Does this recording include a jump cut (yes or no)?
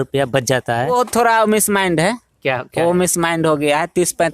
yes